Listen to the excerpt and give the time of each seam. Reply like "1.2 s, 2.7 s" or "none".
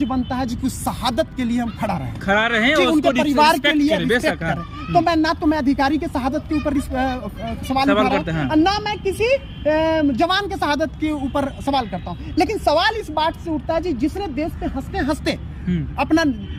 none